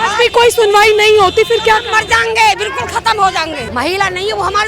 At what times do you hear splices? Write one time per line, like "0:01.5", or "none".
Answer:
0:03.6